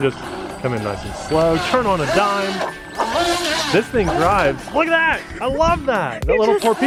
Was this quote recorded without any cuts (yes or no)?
yes